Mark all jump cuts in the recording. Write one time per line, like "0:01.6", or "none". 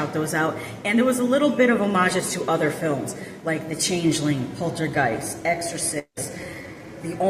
none